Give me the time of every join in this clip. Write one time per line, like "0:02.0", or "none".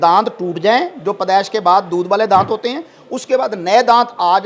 none